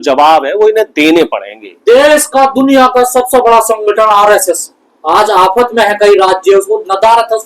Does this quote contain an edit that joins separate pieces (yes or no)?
no